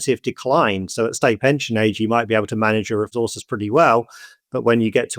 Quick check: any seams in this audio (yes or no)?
yes